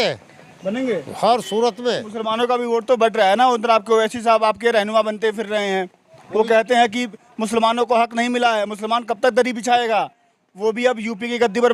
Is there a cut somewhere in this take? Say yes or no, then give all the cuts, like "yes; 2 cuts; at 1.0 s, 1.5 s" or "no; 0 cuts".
yes; 1 cut; at 2.1 s